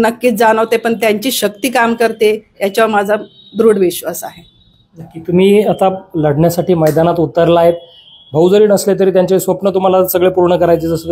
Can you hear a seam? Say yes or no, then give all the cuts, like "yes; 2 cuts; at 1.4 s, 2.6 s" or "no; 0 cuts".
no; 0 cuts